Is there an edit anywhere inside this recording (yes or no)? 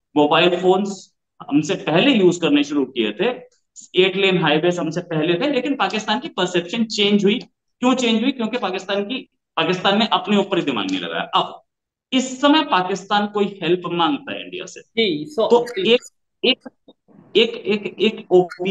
no